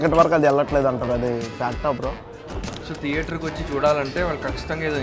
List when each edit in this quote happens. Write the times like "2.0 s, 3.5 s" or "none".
2.5 s